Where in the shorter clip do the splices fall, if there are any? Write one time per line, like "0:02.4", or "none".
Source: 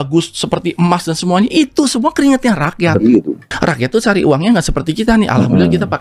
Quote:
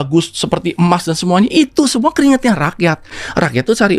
0:03.0